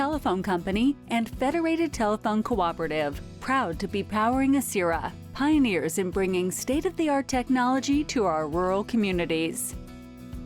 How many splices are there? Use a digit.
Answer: 1